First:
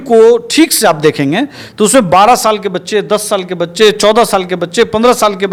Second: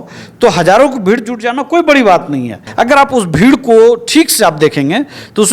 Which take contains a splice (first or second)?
second